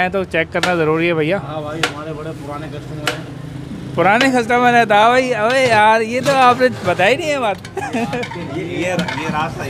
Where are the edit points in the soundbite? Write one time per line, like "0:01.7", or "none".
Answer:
none